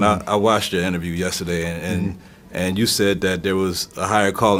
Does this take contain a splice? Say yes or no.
no